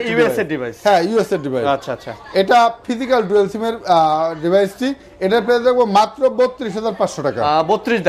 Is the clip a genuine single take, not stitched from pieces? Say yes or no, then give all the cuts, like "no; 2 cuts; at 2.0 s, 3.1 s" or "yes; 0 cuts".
yes; 0 cuts